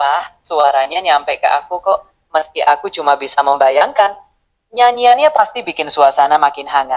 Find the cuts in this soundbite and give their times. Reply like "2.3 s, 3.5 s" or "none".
none